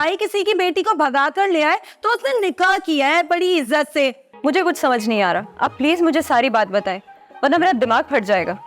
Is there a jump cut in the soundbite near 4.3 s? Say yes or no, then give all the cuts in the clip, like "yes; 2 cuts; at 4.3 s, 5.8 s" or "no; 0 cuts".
yes; 1 cut; at 4.3 s